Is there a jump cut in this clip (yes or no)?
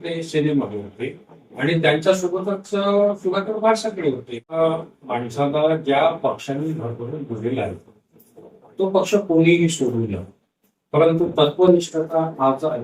yes